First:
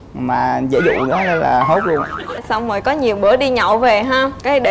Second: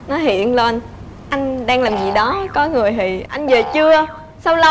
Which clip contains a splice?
first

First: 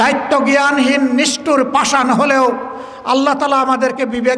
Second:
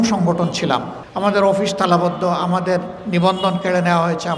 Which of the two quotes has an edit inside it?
second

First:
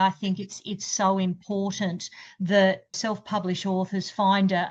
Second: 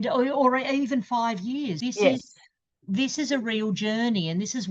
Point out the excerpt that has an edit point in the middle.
first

